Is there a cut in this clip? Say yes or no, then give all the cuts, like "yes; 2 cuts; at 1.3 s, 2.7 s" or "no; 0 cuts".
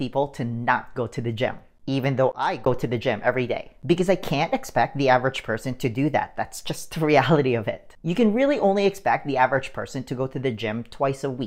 no; 0 cuts